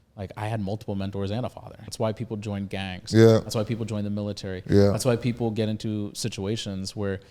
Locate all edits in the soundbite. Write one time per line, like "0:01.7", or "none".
0:01.8